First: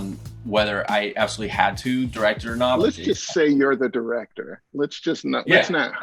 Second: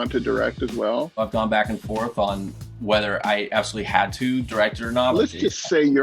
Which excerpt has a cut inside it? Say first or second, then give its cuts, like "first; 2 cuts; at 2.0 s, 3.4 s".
second; 1 cut; at 1.2 s